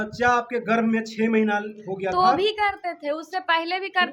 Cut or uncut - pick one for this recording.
uncut